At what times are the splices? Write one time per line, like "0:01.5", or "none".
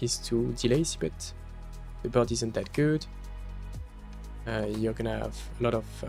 none